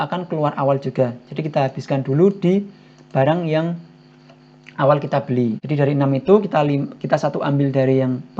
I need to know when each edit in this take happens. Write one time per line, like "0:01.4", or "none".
0:05.6